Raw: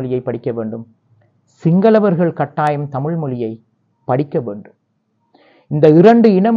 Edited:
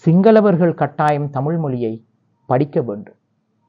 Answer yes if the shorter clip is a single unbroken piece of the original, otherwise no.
yes